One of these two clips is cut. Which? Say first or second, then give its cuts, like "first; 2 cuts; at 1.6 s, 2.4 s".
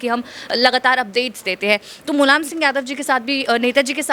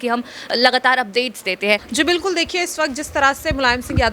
second; 1 cut; at 1.9 s